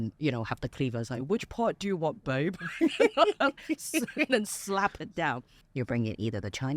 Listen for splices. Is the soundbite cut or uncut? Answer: cut